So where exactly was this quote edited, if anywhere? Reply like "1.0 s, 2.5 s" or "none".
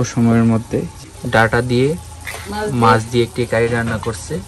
1.0 s